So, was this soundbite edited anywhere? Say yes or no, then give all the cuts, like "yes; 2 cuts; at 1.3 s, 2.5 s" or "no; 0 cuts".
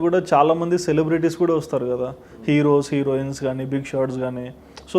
no; 0 cuts